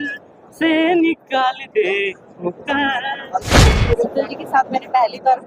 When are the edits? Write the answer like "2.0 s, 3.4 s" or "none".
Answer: 3.6 s